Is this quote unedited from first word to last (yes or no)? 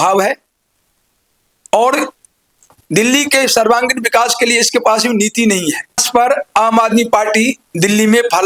no